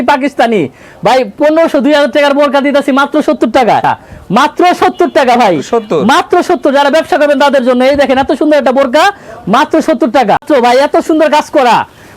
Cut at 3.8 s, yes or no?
yes